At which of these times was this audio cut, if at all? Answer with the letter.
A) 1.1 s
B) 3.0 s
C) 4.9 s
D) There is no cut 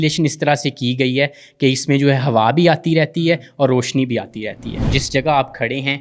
C